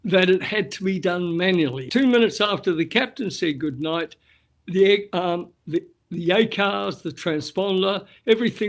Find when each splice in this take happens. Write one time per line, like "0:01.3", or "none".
0:01.8